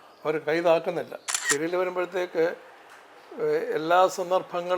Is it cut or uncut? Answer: cut